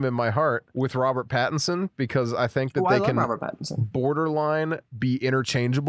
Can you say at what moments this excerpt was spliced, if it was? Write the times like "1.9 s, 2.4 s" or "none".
none